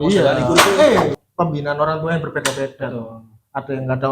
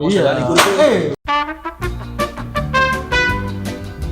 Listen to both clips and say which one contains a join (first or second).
first